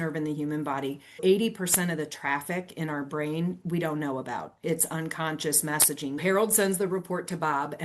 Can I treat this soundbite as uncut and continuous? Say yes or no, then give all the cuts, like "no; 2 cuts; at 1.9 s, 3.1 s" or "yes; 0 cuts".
no; 2 cuts; at 1.2 s, 6.2 s